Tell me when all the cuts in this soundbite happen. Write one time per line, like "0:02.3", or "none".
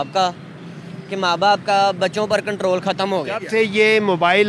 0:03.4